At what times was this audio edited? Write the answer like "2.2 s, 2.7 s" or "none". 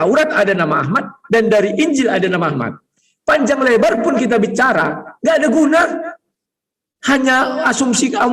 none